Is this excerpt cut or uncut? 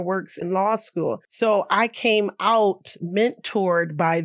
cut